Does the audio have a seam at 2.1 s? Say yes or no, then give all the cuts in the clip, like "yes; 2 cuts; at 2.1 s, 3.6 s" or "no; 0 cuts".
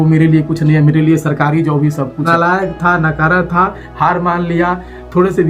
yes; 1 cut; at 2.1 s